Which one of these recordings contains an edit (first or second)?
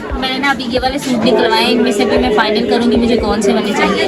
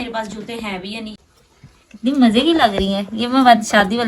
second